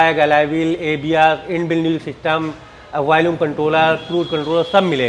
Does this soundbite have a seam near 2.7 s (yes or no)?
no